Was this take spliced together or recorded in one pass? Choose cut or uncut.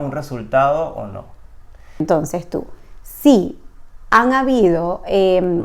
cut